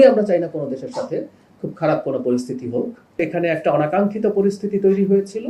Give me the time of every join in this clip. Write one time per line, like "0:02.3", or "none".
0:03.2

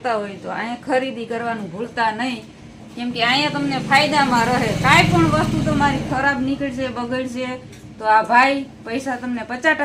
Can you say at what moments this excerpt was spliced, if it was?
none

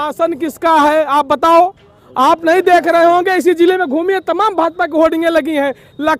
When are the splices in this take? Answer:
none

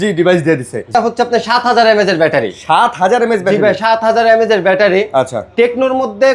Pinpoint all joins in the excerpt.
0:00.9

